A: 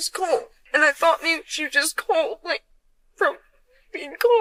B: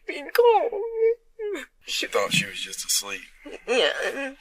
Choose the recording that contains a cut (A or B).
B